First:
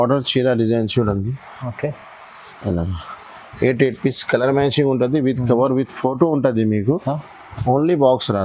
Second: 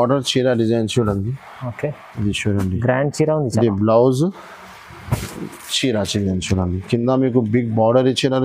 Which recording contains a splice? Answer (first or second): second